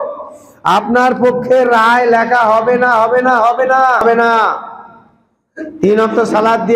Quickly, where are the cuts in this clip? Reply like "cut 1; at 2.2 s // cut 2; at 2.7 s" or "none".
cut 1; at 4.0 s

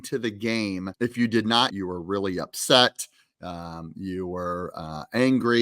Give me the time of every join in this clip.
cut 1; at 0.9 s // cut 2; at 1.7 s

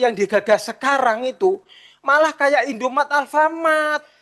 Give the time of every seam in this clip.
none

